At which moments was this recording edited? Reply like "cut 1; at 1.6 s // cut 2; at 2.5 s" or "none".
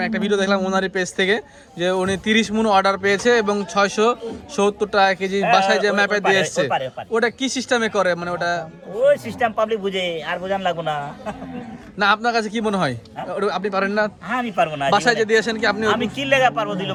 none